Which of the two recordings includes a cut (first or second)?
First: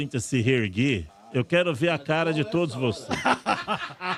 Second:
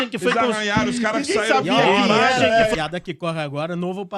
second